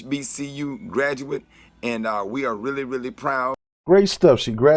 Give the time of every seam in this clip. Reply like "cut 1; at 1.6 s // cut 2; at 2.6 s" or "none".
none